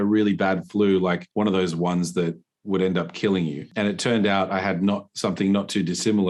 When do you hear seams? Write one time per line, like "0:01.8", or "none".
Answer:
0:01.2
0:03.7